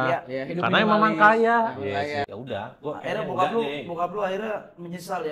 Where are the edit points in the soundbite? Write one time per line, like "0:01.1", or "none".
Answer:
0:02.3